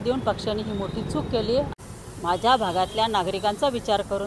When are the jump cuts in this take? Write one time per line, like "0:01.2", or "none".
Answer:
0:01.8